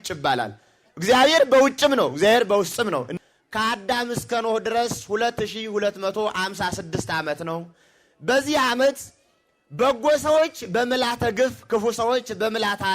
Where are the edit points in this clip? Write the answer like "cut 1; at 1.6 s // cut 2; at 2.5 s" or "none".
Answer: cut 1; at 3.1 s